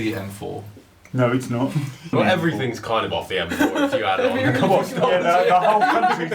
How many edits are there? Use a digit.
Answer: 1